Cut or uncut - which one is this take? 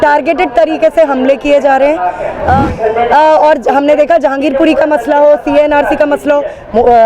cut